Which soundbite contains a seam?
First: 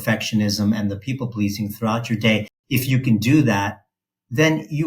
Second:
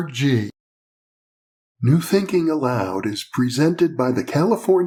first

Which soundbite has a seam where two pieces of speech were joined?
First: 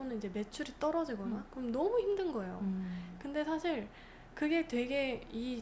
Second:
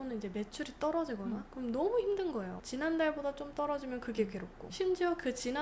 second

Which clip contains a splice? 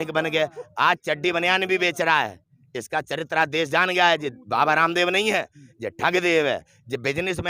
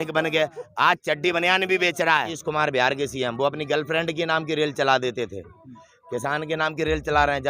second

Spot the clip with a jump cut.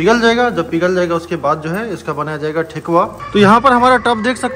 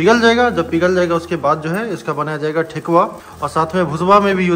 first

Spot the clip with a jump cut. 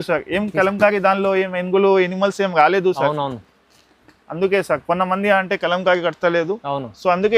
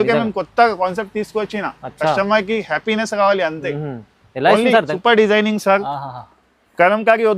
second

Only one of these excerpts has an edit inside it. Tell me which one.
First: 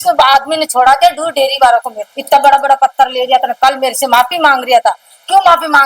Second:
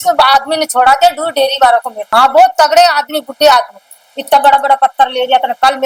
first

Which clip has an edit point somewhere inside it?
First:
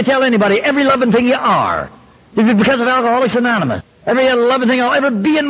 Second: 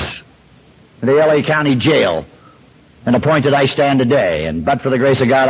first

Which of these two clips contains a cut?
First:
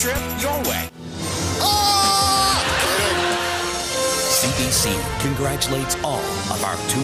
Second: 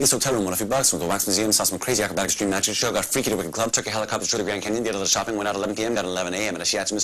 first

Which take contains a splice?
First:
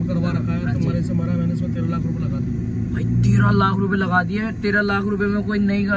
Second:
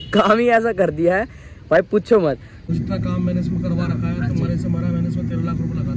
second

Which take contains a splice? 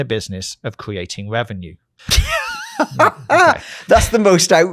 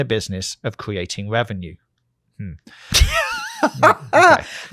first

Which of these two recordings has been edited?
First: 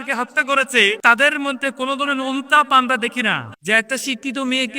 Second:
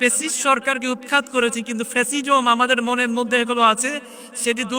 first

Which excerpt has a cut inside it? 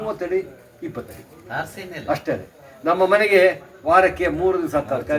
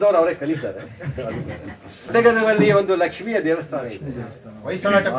second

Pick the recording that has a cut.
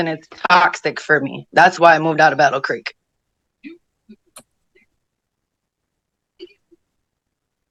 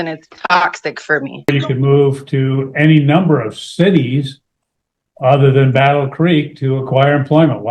second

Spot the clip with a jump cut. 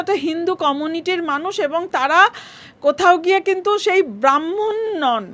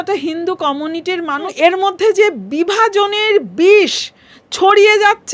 second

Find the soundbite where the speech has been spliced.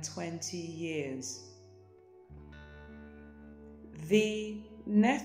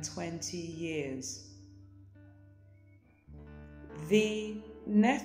second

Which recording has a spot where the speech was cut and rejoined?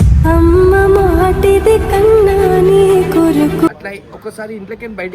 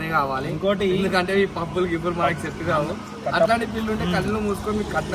first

